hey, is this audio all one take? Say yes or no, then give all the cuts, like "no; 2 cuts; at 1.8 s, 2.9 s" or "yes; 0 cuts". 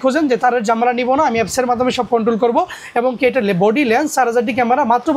yes; 0 cuts